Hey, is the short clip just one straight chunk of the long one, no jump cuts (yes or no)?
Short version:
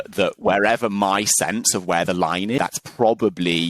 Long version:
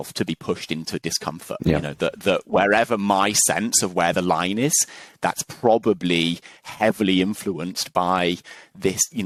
no